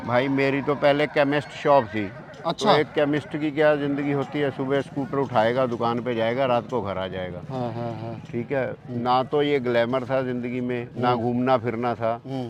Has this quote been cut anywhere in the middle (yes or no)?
no